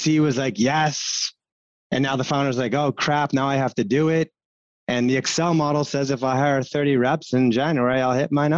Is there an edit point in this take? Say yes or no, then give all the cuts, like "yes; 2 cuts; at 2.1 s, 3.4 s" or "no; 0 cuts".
no; 0 cuts